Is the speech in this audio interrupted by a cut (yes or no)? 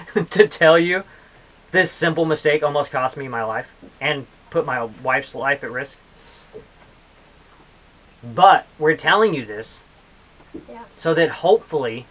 no